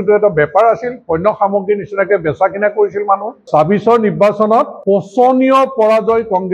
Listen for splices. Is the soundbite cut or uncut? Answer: cut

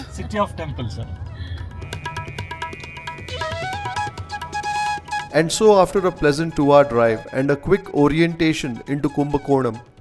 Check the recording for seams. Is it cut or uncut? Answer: uncut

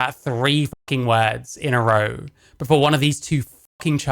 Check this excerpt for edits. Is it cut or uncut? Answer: uncut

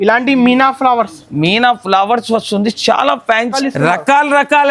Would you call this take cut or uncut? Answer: cut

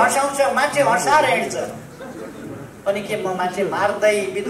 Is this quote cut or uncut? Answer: uncut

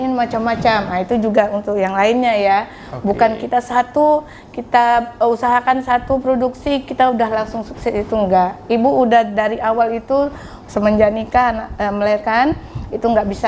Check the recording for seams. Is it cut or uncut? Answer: uncut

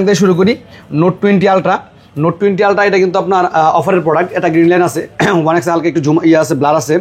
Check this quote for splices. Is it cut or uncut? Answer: uncut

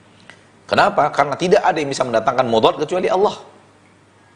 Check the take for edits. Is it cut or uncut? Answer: uncut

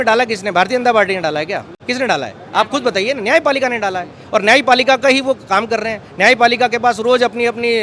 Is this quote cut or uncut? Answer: cut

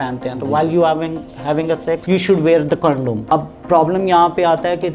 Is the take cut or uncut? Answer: cut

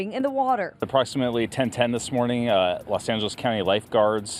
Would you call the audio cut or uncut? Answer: cut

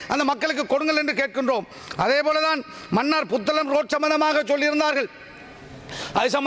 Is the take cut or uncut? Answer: uncut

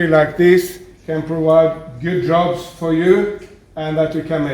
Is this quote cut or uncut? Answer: uncut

